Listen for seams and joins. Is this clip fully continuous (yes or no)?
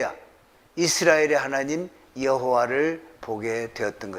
yes